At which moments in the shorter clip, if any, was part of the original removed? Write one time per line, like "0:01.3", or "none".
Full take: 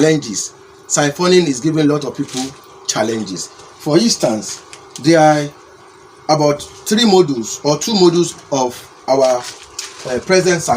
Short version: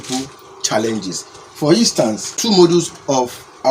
0:02.4

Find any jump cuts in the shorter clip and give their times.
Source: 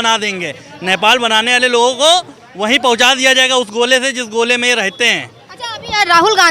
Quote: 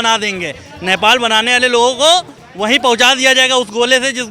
none

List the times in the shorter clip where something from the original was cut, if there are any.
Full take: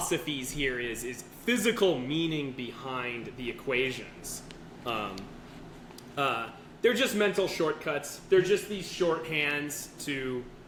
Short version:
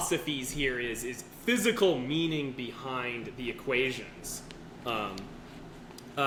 none

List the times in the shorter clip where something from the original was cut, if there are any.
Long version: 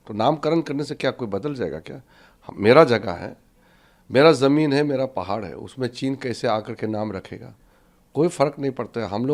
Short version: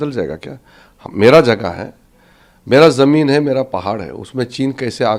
none

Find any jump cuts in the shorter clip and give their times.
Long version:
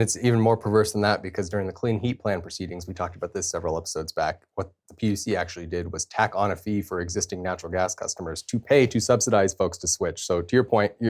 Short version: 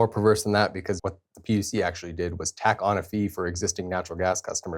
0:01.0

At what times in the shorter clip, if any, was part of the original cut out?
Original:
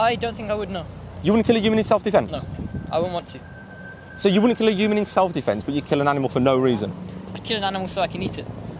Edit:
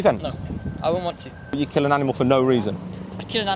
0:01.5

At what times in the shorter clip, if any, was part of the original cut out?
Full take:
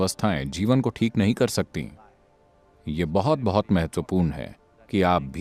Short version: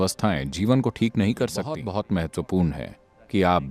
0:01.8

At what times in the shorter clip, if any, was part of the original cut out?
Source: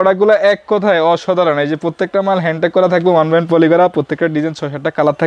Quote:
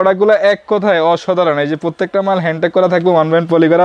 none

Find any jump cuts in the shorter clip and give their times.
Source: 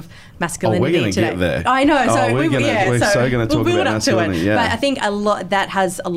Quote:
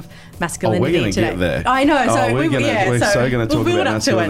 none

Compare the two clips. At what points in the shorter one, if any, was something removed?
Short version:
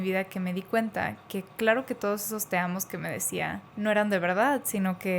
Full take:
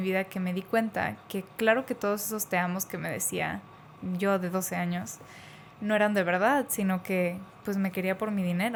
0:03.6

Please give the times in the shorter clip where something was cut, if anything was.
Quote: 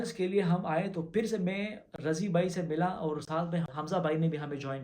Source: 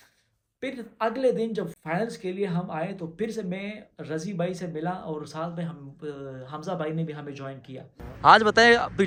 0:03.8

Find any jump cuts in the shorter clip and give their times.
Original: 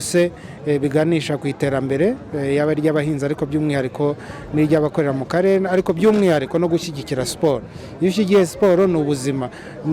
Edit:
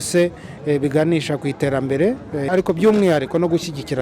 0:02.5

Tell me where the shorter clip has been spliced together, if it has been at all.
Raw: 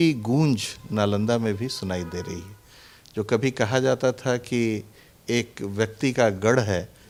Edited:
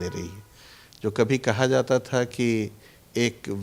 none

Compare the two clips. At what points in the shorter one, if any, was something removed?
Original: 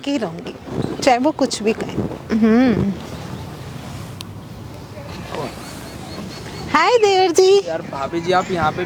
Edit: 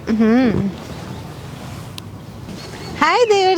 0:02.5

